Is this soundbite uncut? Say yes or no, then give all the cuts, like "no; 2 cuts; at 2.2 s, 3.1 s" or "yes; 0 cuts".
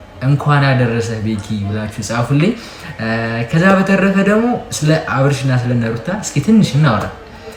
yes; 0 cuts